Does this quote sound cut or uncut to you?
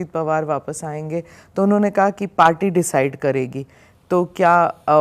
uncut